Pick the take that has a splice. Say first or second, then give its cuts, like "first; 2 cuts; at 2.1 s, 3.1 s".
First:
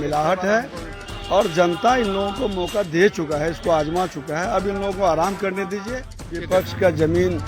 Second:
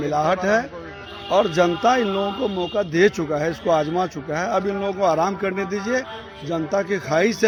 first; 1 cut; at 6.3 s